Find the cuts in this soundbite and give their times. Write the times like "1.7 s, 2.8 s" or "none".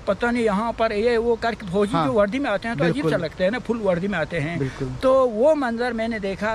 none